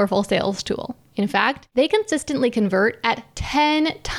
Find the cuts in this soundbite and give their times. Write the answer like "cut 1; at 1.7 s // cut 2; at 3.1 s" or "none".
cut 1; at 1.3 s

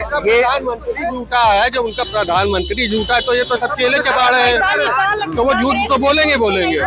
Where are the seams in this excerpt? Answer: none

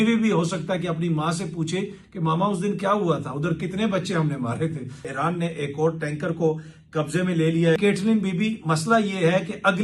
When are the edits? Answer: cut 1; at 5.1 s // cut 2; at 7.8 s

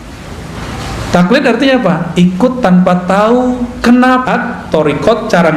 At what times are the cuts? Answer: cut 1; at 4.2 s

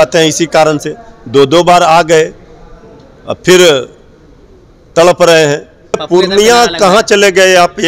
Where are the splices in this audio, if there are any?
cut 1; at 6.0 s

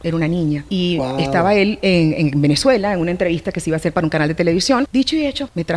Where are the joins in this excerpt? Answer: cut 1; at 4.8 s

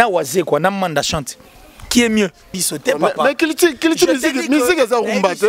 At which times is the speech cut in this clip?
cut 1; at 2.6 s

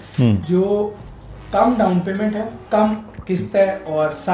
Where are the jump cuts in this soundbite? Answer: cut 1; at 2.6 s

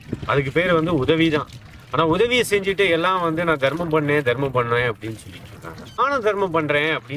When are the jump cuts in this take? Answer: cut 1; at 6.0 s

